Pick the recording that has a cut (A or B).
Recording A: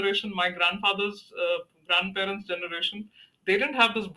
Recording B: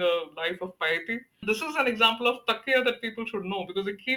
B